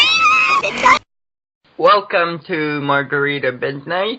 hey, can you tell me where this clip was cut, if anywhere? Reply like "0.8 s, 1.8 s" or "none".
1.0 s

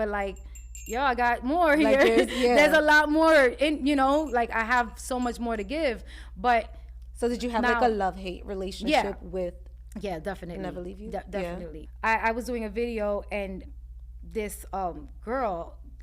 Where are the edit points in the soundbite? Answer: 11.8 s, 13.7 s

